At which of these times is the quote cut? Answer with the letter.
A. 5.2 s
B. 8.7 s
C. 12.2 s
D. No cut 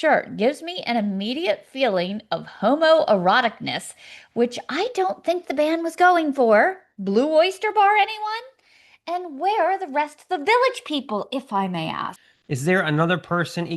C